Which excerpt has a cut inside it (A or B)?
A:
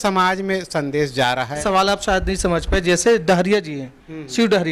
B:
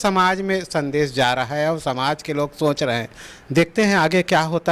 A